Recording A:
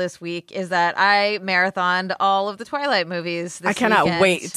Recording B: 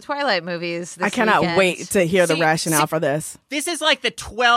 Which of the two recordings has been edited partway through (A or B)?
B